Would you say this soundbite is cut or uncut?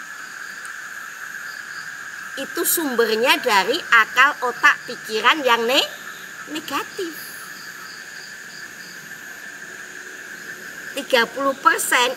uncut